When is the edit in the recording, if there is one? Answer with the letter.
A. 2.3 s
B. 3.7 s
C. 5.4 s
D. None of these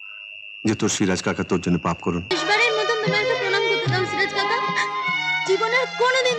A